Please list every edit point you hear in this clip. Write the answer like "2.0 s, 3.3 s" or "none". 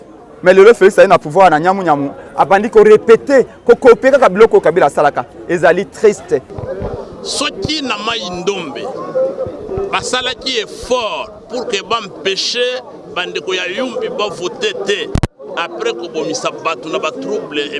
6.5 s